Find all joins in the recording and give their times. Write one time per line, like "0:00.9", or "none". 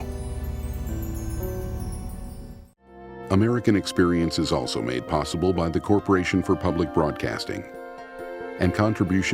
0:02.7